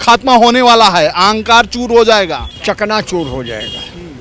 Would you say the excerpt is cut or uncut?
cut